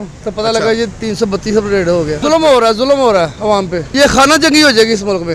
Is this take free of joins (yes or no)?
yes